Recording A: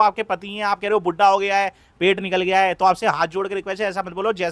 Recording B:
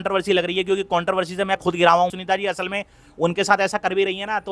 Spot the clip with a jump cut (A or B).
B